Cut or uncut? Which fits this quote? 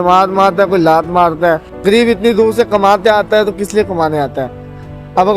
cut